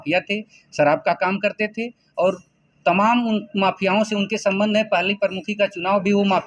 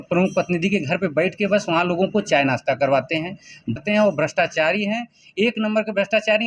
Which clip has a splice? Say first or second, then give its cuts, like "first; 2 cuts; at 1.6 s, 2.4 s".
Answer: second; 1 cut; at 3.8 s